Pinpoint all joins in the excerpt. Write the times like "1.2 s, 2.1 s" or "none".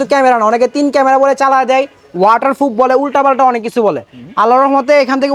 none